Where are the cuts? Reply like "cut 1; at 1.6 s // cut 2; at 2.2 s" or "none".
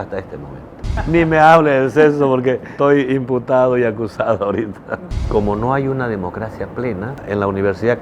cut 1; at 1.1 s // cut 2; at 2.7 s // cut 3; at 4.9 s // cut 4; at 7.2 s